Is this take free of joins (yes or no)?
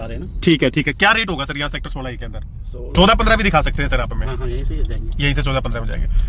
no